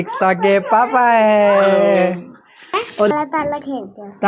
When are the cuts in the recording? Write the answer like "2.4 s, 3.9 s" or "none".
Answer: 3.1 s